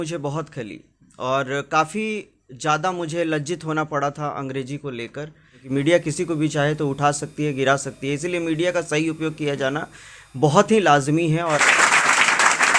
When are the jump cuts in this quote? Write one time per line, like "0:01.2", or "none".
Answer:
0:05.6
0:11.6